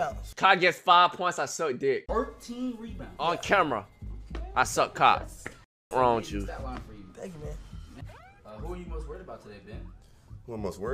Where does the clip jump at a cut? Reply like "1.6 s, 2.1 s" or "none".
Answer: none